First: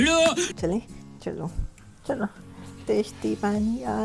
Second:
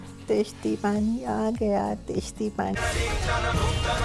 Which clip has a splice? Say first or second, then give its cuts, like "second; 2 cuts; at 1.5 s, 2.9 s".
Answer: second; 1 cut; at 2.8 s